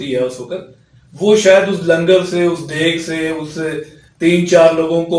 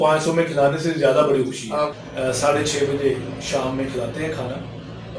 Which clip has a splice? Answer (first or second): second